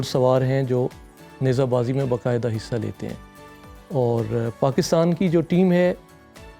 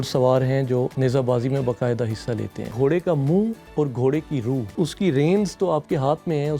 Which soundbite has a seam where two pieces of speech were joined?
second; 4 cuts; at 0.9 s, 2.7 s, 3.6 s, 4.7 s

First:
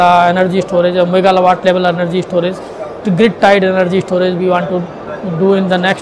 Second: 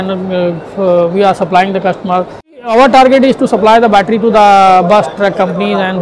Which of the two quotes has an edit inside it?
second; 1 cut; at 2.6 s

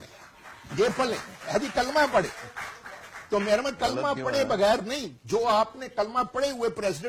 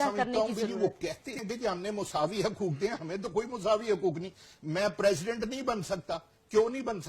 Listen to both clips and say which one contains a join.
second; 1 cut; at 1.3 s

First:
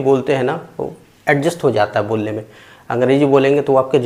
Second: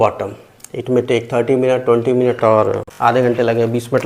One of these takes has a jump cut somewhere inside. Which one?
second; 1 cut; at 2.9 s

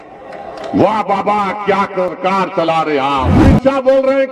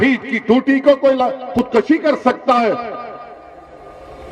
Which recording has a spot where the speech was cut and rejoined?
first; 1 cut; at 3.4 s

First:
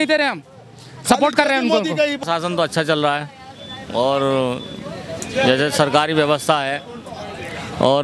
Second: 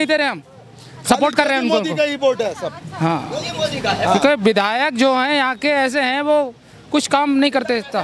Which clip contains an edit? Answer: first; 1 cut; at 2.2 s

